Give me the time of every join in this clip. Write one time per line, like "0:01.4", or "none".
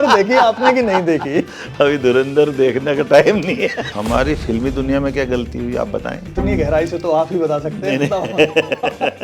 0:03.9
0:06.3